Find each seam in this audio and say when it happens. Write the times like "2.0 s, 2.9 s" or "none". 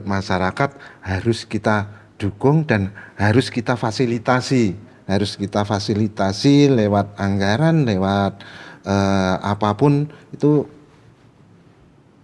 none